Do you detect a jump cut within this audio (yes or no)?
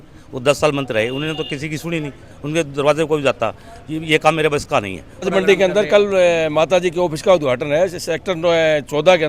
yes